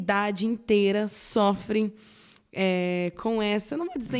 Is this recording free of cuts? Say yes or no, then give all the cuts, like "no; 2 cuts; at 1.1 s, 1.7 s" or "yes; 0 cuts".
yes; 0 cuts